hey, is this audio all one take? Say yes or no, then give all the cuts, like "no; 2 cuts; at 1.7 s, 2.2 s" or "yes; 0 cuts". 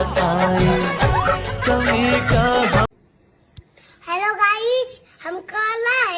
yes; 0 cuts